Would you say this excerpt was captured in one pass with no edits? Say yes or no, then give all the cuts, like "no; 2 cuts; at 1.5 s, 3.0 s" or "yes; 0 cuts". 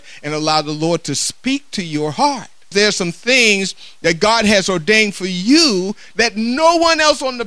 no; 2 cuts; at 2.7 s, 6.1 s